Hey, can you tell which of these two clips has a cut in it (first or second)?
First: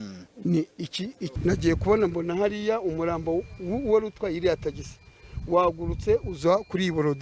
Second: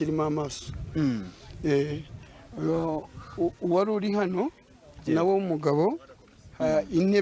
first